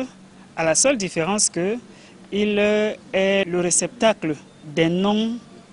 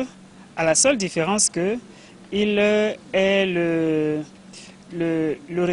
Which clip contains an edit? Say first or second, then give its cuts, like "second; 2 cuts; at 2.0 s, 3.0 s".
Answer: first; 2 cuts; at 3.5 s, 4.6 s